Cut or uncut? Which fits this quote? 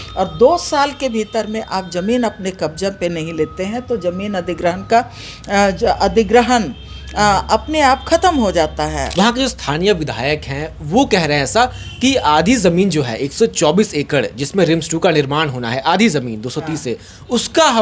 cut